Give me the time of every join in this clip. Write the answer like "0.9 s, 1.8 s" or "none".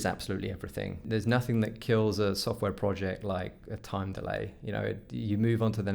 1.0 s